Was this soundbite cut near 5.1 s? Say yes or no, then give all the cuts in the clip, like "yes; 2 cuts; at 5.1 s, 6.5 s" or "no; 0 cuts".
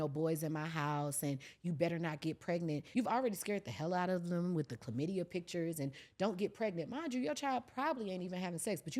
no; 1 cut; at 2.8 s